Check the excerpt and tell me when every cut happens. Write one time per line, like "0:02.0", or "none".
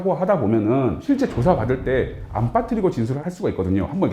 0:01.0